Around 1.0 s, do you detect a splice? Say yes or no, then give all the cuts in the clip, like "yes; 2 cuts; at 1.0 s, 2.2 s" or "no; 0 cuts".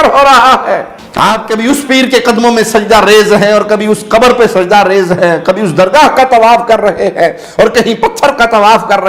yes; 1 cut; at 1.0 s